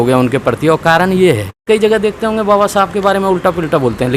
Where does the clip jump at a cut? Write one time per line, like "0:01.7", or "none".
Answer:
0:01.6